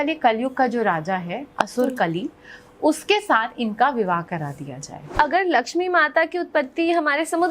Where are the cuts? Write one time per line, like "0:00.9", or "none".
0:05.0